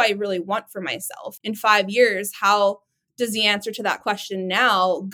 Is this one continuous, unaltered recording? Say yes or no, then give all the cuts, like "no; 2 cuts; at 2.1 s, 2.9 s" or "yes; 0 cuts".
no; 1 cut; at 1.3 s